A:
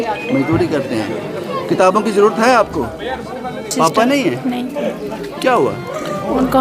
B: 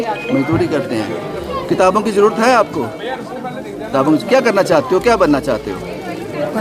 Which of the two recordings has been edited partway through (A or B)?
A